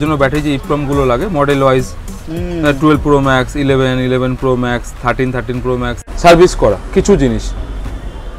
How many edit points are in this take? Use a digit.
1